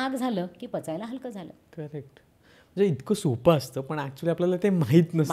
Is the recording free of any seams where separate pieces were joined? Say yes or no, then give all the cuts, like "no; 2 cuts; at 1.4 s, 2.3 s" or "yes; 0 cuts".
yes; 0 cuts